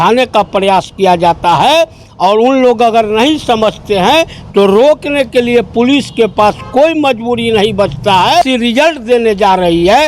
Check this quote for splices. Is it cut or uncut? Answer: cut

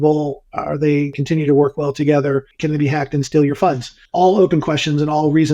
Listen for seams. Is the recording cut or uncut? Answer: cut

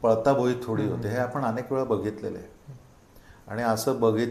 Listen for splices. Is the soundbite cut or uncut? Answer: uncut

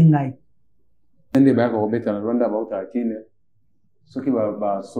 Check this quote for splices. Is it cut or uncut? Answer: cut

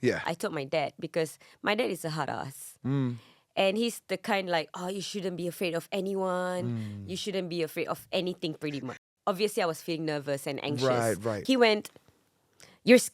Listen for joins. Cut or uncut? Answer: cut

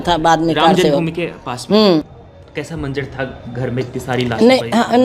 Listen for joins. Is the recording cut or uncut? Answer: cut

